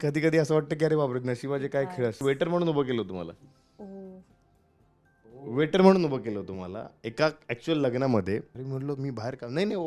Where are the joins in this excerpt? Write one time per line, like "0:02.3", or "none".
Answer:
0:02.2
0:08.6